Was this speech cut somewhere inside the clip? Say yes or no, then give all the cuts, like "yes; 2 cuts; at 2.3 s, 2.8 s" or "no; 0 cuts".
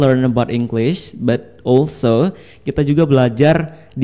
no; 0 cuts